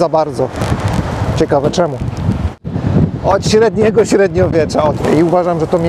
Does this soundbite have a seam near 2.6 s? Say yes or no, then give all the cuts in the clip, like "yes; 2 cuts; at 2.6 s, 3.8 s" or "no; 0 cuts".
yes; 2 cuts; at 2.6 s, 5.0 s